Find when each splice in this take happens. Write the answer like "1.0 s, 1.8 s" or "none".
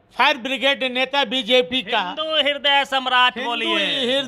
none